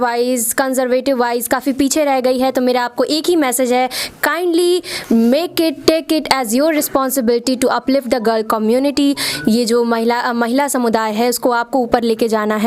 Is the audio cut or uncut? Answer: uncut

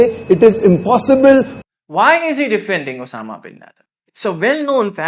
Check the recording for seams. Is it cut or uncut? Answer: cut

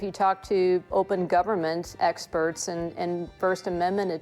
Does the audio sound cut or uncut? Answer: cut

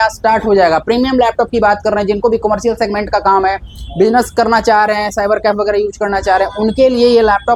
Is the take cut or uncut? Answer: uncut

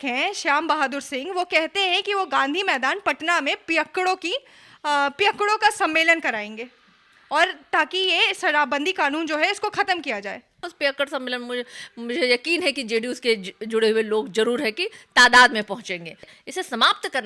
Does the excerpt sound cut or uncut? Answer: cut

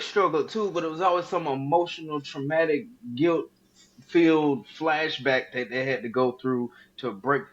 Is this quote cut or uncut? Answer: uncut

